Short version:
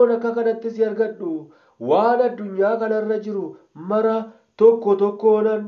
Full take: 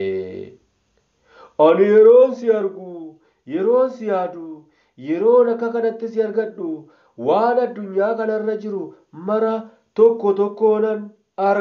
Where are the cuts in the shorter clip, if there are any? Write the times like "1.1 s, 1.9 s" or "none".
none